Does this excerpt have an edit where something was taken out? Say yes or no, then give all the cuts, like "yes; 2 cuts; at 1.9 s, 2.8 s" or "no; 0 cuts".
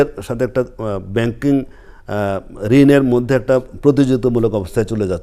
no; 0 cuts